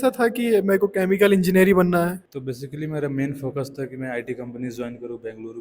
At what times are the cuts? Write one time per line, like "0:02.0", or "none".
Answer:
0:02.2